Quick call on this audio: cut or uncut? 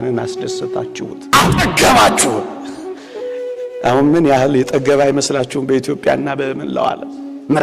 cut